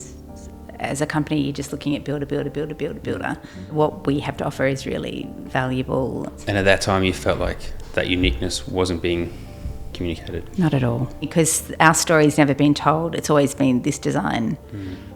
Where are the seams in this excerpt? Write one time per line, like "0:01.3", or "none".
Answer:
0:03.6
0:05.4
0:06.4
0:11.3